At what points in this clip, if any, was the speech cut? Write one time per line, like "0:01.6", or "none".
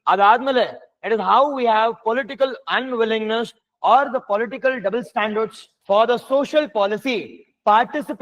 0:05.7